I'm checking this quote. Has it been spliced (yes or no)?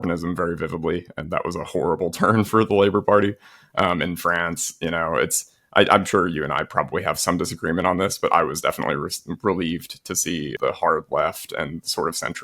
yes